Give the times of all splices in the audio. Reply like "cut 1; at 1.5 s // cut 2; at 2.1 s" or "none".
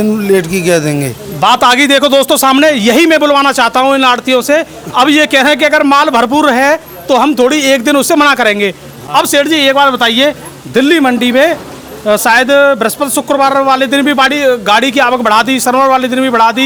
none